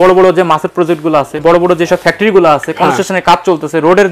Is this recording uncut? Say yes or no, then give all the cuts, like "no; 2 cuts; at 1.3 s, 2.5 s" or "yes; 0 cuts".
no; 1 cut; at 1.4 s